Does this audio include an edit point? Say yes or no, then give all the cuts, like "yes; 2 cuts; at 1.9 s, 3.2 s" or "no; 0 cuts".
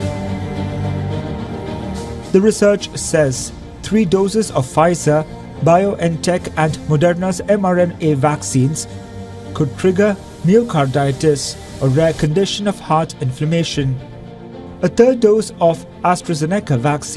no; 0 cuts